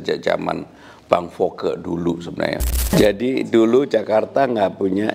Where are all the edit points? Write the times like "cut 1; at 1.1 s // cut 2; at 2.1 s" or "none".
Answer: cut 1; at 2.9 s